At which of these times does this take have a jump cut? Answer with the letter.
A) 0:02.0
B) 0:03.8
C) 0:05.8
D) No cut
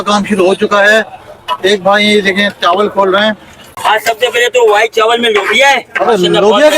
B